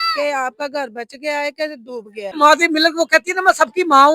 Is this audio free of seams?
no; 1 cut; at 2.3 s

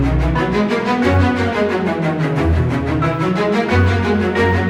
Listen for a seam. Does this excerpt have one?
no; 0 cuts

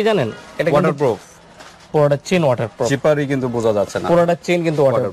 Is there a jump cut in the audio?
no; 0 cuts

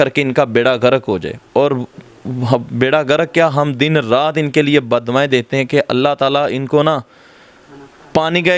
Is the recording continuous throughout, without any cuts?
yes; 0 cuts

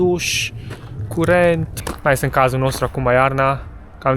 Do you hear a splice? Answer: yes; 1 cut; at 1.9 s

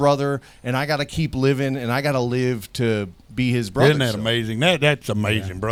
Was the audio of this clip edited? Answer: no; 0 cuts

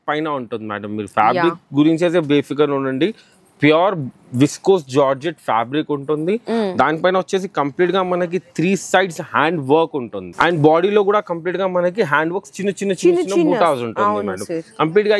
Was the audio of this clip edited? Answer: no; 0 cuts

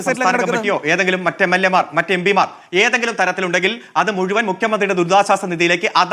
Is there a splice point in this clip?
no; 0 cuts

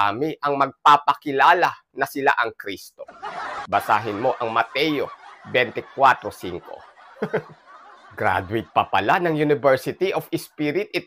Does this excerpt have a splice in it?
yes; 1 cut; at 7.8 s

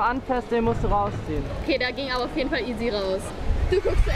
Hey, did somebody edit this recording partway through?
yes; 1 cut; at 1.6 s

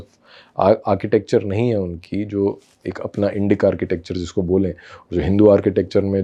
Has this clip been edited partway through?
no; 0 cuts

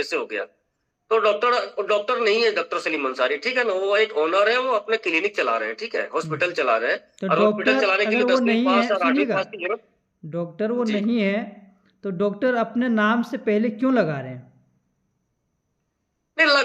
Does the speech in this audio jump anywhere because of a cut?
no; 0 cuts

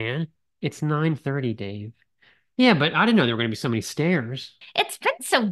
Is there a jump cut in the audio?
yes; 1 cut; at 4.6 s

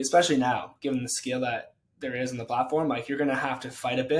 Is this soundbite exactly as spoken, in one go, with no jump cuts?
yes; 0 cuts

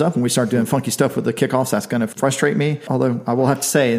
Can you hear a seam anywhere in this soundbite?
yes; 2 cuts; at 2.1 s, 2.8 s

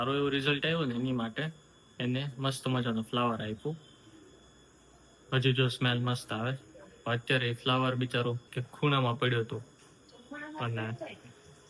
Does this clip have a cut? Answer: no; 0 cuts

